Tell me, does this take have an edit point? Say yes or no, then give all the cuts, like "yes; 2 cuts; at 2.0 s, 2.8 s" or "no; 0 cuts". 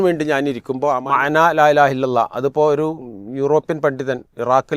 yes; 1 cut; at 1.0 s